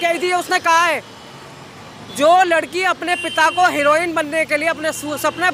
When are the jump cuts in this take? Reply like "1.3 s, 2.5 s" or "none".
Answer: none

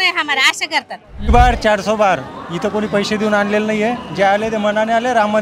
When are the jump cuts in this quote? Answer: 1.3 s

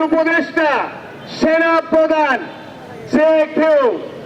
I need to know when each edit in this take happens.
none

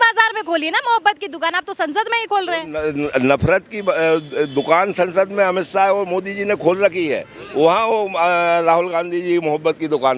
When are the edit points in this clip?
none

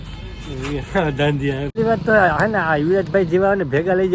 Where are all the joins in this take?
1.7 s

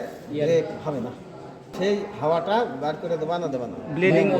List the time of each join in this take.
1.7 s

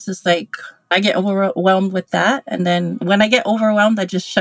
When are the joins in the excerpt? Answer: 0.9 s, 3.0 s

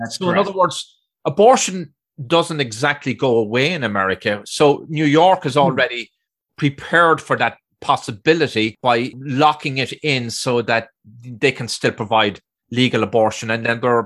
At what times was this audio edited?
8.8 s

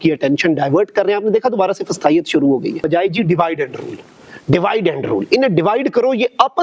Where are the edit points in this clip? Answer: 2.8 s

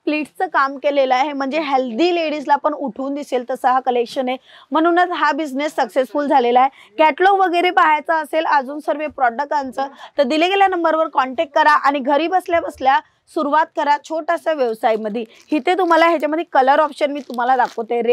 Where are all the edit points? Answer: none

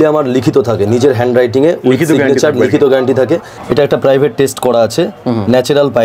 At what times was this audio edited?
3.5 s

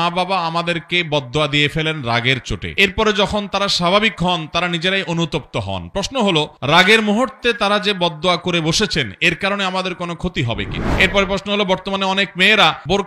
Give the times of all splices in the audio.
10.8 s

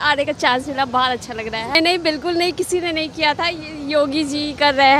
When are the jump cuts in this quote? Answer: 1.8 s

